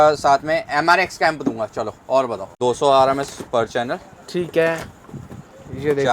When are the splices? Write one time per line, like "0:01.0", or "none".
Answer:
0:02.4